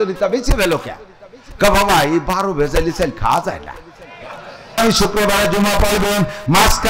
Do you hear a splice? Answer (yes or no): yes